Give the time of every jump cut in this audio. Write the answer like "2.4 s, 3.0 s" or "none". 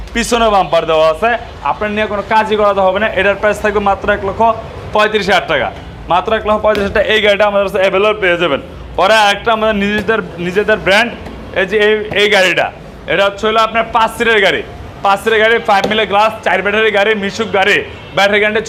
none